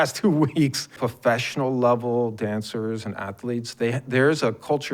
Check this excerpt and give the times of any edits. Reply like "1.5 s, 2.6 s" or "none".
1.0 s